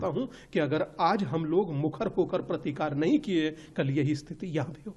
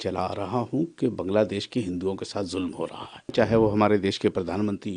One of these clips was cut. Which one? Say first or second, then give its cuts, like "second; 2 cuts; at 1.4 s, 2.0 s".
second; 1 cut; at 3.3 s